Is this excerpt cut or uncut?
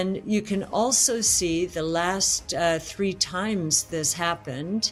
uncut